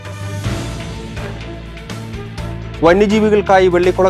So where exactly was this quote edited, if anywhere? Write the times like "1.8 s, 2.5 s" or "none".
none